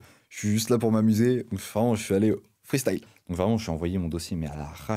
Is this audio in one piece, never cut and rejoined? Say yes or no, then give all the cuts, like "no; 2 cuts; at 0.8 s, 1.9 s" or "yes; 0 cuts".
no; 1 cut; at 3.0 s